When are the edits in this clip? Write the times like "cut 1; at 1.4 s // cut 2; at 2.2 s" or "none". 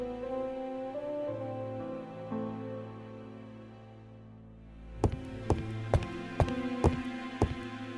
none